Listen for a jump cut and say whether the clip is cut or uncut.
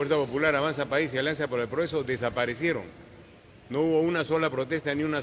uncut